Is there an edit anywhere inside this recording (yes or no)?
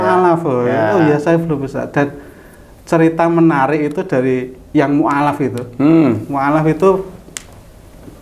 no